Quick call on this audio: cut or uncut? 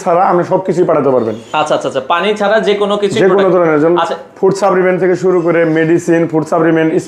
uncut